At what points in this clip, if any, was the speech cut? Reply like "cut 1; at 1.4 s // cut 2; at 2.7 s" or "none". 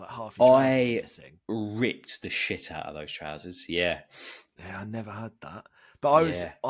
none